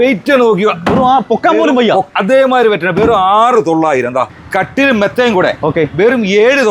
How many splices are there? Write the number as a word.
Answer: one